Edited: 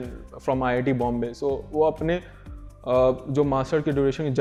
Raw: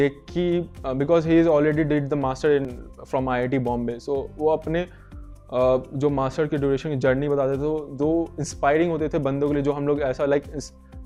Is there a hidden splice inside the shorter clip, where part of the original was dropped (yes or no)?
no